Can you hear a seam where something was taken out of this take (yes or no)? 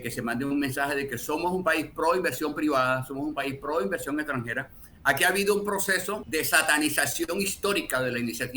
yes